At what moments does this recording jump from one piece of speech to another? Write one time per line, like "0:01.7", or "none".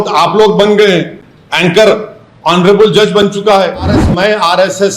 0:04.0